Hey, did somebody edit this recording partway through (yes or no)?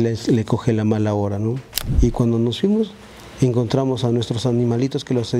yes